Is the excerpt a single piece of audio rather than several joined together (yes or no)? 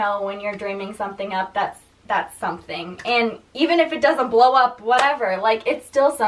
yes